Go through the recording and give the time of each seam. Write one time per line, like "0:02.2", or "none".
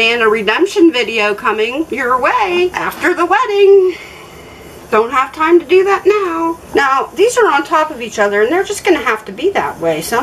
none